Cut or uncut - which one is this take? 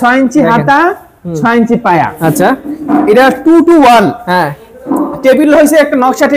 uncut